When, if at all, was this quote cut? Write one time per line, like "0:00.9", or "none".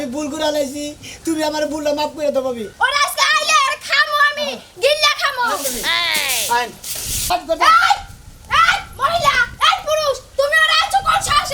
0:02.7
0:07.3

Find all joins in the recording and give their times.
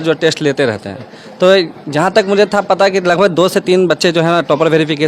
none

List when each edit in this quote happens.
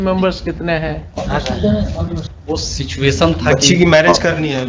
0:02.2

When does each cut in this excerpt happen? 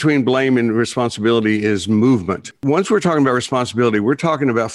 0:02.5

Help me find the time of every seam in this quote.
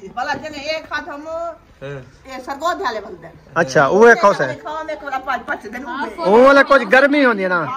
none

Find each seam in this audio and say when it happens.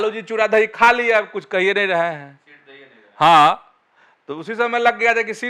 none

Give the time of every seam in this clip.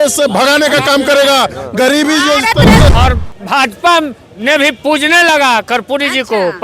0:02.9

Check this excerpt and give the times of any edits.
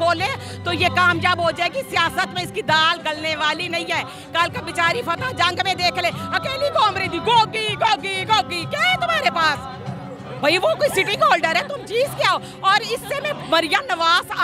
none

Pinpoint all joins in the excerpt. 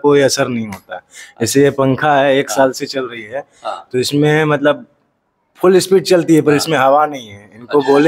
none

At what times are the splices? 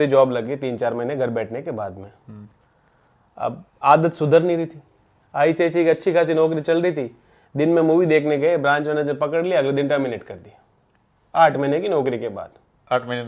none

